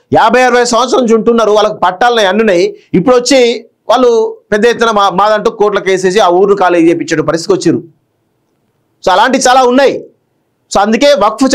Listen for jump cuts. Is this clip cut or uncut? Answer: uncut